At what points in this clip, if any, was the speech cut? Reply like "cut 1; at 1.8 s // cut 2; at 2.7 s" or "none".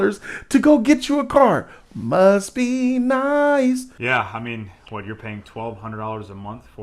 cut 1; at 3.9 s

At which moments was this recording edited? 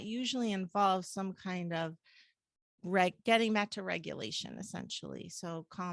none

